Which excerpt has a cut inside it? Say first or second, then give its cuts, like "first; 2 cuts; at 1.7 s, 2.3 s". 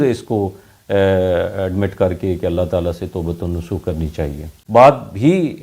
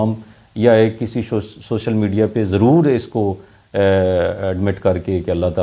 first; 1 cut; at 4.5 s